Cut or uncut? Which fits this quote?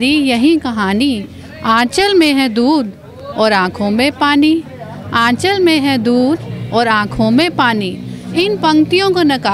uncut